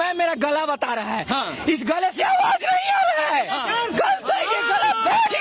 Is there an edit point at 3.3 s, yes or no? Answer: no